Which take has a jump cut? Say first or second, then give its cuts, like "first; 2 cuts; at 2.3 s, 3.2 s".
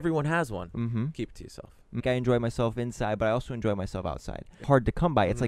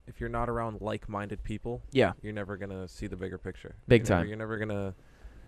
first; 2 cuts; at 2.0 s, 4.6 s